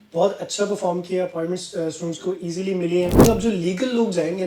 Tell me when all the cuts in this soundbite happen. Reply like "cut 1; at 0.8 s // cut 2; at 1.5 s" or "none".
cut 1; at 3.2 s